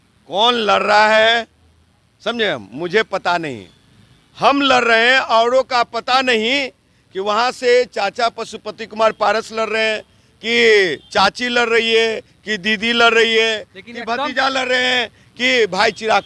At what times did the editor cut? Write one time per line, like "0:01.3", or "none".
none